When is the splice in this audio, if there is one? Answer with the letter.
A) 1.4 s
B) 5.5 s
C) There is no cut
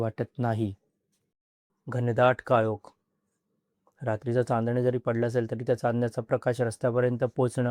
A